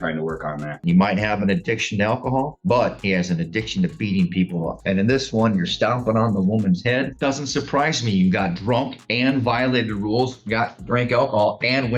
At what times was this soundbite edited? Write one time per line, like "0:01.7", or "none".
0:00.8
0:04.8
0:07.1